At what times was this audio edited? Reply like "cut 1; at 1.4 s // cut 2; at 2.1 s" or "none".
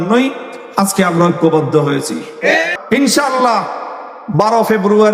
cut 1; at 2.7 s